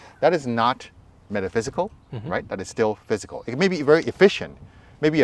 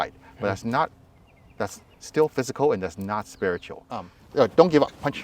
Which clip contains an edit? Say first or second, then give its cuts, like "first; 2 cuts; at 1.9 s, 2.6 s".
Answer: second; 1 cut; at 4.2 s